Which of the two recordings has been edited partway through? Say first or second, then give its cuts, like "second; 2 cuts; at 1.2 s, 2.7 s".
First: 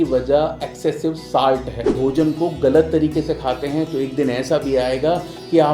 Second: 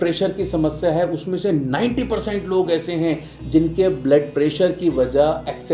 first; 1 cut; at 1.9 s